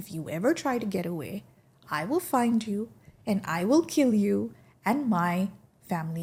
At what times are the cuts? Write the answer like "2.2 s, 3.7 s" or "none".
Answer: none